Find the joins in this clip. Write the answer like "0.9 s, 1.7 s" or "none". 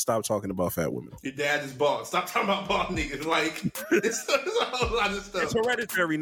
1.2 s